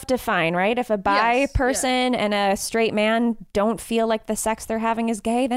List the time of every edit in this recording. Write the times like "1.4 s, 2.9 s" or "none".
none

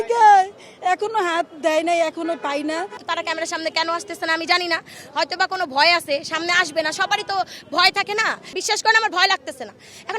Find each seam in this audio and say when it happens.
3.0 s, 8.6 s

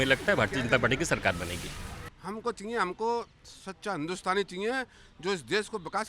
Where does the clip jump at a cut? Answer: 2.0 s

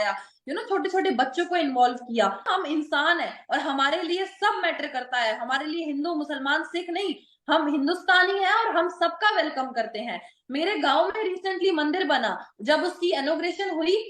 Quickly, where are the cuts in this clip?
2.4 s

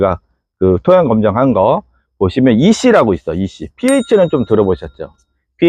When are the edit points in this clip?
none

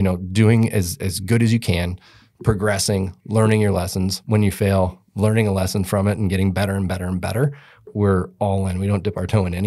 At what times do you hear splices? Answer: 7.9 s

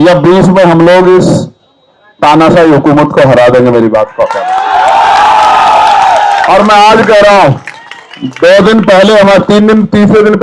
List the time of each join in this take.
none

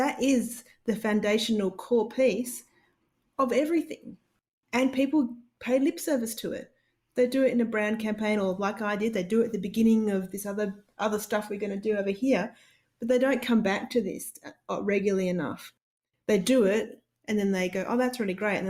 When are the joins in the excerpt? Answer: none

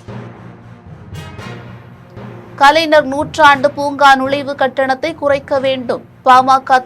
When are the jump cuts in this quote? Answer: 1.3 s

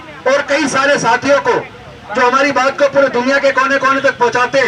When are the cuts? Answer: none

